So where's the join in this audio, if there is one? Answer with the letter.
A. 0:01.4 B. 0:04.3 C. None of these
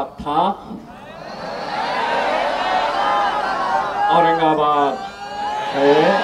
C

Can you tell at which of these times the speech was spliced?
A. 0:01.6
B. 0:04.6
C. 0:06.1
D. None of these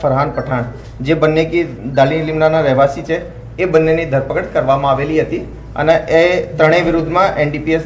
C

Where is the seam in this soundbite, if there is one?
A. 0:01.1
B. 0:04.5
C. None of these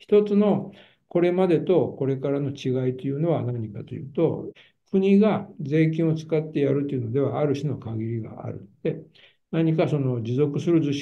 B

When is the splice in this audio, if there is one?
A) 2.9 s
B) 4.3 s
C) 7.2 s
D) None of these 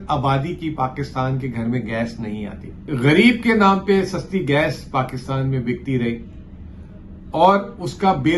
A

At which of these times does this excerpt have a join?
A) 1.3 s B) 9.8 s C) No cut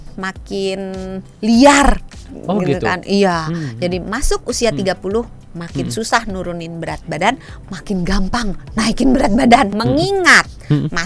B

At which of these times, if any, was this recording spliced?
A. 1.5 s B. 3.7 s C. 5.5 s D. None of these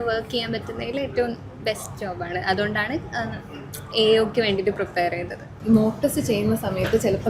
C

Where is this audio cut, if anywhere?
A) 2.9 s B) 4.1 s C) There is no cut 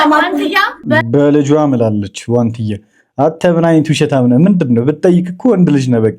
C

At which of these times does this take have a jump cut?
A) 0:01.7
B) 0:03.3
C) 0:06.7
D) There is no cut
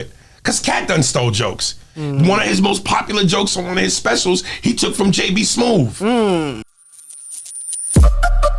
C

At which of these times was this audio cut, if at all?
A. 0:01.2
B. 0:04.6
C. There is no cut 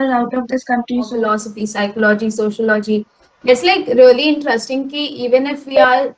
A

